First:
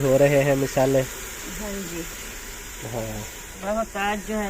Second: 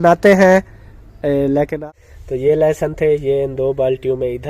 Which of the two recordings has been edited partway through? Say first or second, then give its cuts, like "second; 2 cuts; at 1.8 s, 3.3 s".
second; 1 cut; at 1.7 s